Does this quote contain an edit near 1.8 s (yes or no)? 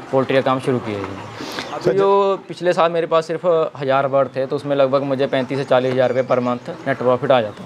yes